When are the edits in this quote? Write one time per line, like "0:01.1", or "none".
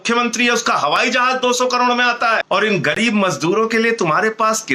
0:02.4

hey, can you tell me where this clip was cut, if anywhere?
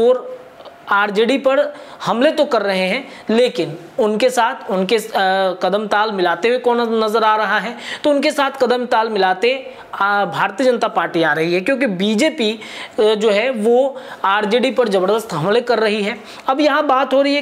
none

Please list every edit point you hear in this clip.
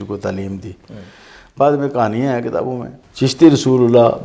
0:02.9

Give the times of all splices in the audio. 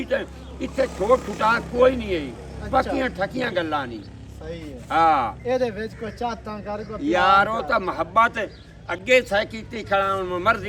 none

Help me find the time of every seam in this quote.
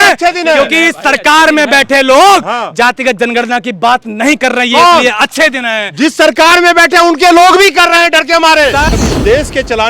0:08.9

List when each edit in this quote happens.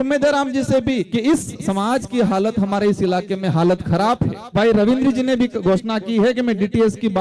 0:01.1
0:04.5

